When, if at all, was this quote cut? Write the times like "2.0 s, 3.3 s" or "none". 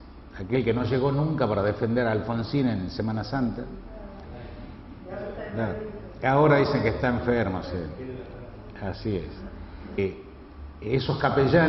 none